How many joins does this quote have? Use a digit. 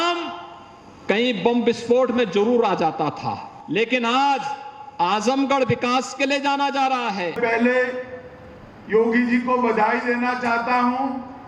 2